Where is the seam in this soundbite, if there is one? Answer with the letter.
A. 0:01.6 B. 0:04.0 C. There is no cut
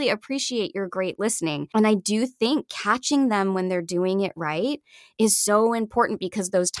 A